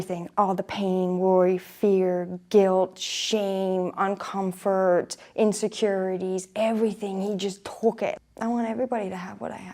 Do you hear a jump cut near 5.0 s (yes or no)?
no